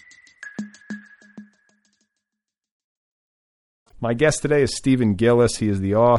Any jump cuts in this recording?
no; 0 cuts

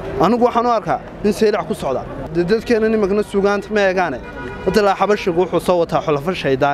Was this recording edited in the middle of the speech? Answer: yes; 1 cut; at 2.3 s

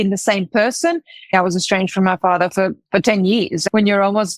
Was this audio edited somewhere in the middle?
yes; 2 cuts; at 1.3 s, 3.6 s

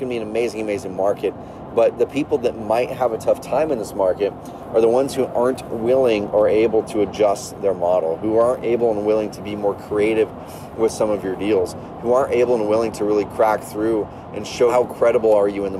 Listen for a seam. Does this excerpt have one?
no; 0 cuts

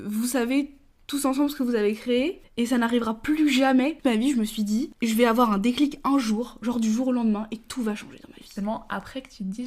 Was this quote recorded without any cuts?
no; 2 cuts; at 4.0 s, 8.5 s

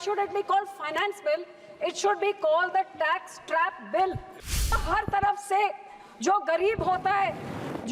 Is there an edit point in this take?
yes; 1 cut; at 4.7 s

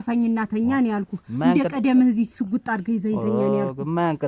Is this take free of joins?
yes; 0 cuts

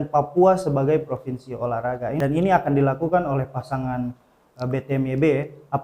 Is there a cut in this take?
yes; 1 cut; at 2.2 s

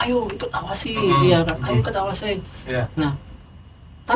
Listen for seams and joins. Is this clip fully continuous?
yes; 0 cuts

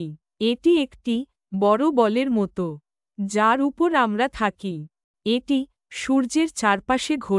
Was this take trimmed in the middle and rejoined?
no; 0 cuts

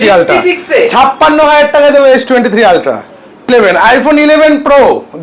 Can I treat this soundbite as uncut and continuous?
no; 1 cut; at 3.5 s

